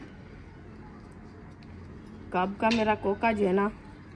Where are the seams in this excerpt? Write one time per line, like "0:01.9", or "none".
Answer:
0:01.6